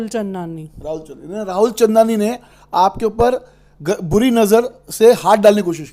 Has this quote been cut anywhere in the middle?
no; 0 cuts

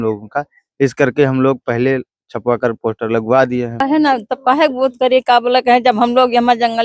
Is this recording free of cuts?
no; 1 cut; at 3.8 s

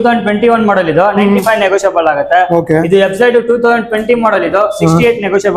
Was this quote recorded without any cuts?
yes; 0 cuts

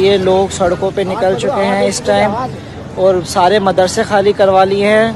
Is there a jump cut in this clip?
no; 0 cuts

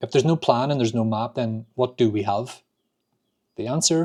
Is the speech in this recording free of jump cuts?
yes; 0 cuts

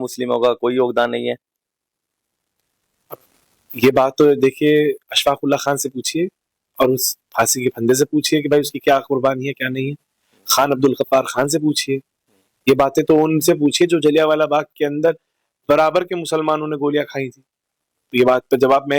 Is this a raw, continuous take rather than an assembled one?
yes; 0 cuts

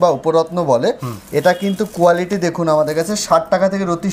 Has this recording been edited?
no; 0 cuts

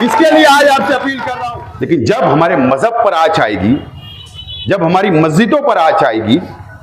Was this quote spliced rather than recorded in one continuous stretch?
yes; 1 cut; at 1.2 s

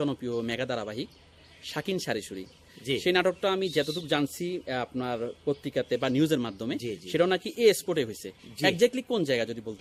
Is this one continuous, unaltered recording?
yes; 0 cuts

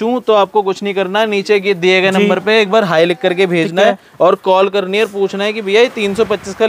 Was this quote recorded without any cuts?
yes; 0 cuts

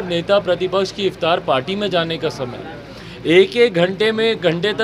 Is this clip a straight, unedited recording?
yes; 0 cuts

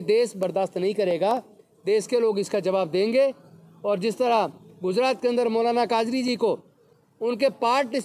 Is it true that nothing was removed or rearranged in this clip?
yes; 0 cuts

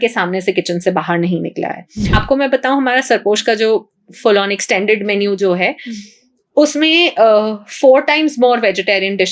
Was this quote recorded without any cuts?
no; 1 cut; at 2.1 s

